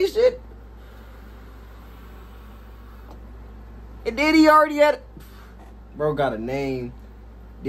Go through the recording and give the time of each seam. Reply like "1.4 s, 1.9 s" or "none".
none